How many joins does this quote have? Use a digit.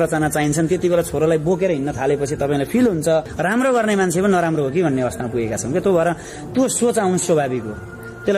1